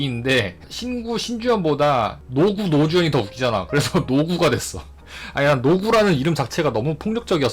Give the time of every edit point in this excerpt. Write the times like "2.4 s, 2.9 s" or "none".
none